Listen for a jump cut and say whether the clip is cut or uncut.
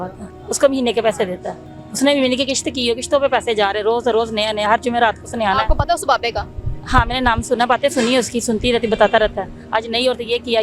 uncut